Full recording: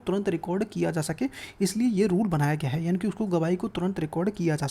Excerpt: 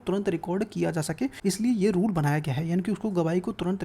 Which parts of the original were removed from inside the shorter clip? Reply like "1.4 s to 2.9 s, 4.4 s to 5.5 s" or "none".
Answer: 1.4 s to 1.5 s